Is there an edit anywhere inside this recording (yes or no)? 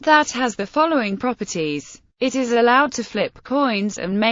yes